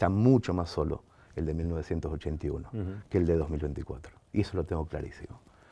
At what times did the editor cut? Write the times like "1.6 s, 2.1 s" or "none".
none